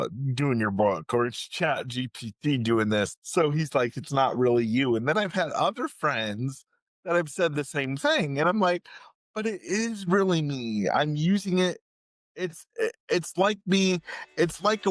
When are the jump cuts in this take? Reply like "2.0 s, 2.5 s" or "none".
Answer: 3.2 s